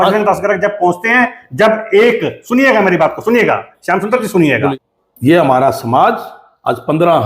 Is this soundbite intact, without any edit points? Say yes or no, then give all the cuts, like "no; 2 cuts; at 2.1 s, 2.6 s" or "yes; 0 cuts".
no; 1 cut; at 4.6 s